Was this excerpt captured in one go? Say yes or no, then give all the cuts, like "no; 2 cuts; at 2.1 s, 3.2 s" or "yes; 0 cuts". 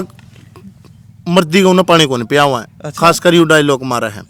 yes; 0 cuts